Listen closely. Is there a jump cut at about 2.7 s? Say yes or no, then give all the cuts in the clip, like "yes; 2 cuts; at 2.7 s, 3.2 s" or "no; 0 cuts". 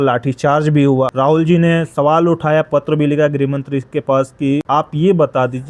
no; 2 cuts; at 1.1 s, 4.6 s